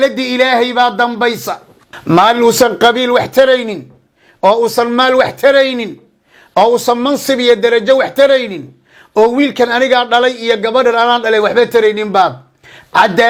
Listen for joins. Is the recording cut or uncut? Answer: uncut